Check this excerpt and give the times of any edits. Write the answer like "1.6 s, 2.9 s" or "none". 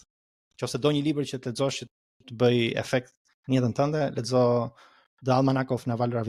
none